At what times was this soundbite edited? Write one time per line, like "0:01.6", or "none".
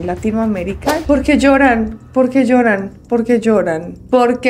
0:01.0